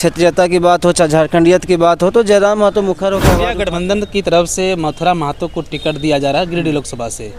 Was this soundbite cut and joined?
yes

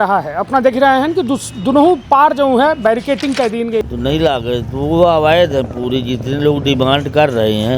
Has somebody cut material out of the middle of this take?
yes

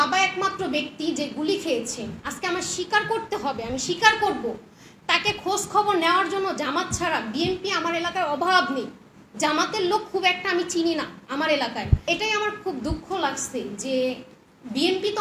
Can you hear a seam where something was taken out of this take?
yes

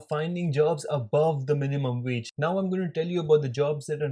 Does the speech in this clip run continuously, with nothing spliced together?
no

